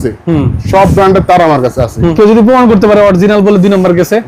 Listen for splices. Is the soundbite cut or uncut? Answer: cut